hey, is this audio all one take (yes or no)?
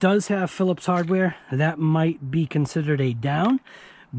yes